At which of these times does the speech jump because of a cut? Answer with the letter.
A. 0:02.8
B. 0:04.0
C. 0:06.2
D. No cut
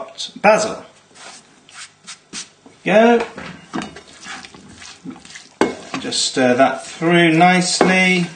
C